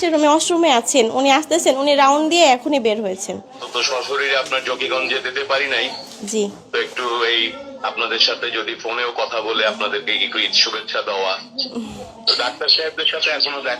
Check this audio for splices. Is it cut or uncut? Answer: cut